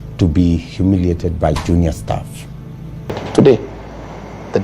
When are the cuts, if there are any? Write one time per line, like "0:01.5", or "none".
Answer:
0:03.2